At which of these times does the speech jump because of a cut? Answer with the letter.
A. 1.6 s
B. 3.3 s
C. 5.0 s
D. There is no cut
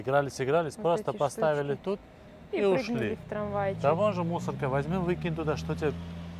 D